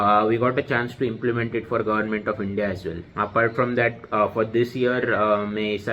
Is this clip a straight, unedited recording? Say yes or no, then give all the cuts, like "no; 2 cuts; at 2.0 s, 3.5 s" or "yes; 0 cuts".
no; 1 cut; at 3.0 s